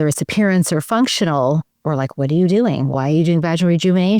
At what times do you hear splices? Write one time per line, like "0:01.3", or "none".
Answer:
0:02.9